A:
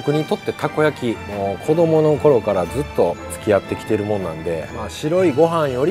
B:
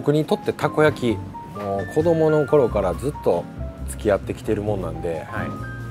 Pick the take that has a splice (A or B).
A